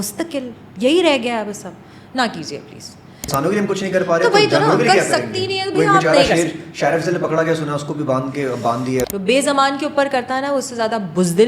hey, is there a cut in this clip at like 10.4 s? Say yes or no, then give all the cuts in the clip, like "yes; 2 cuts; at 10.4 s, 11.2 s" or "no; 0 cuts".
no; 2 cuts; at 3.3 s, 9.1 s